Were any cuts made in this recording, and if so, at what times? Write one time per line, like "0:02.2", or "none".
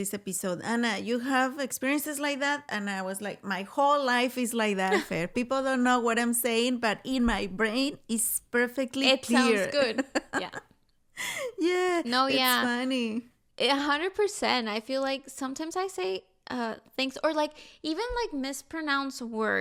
none